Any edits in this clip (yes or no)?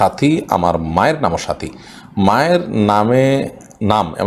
no